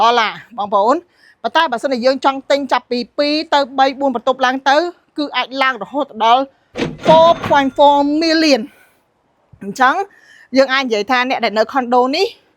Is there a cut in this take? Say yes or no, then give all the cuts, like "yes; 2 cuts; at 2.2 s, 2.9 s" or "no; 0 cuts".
no; 0 cuts